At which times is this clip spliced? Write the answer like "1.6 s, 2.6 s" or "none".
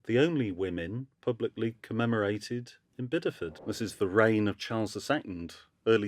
3.5 s